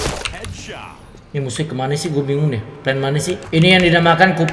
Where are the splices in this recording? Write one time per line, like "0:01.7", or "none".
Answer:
0:03.4